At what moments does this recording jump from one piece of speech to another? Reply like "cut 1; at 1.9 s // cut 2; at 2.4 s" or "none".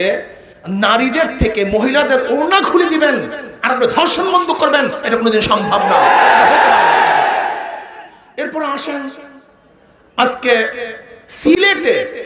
none